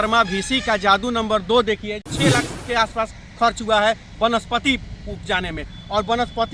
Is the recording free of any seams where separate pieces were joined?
no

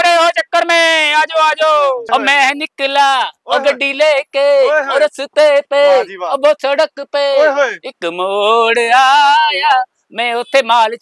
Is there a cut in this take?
yes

